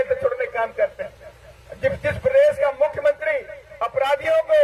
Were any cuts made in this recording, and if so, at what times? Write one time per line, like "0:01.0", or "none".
none

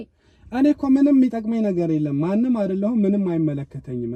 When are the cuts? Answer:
none

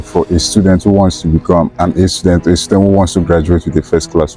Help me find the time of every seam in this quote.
0:01.7

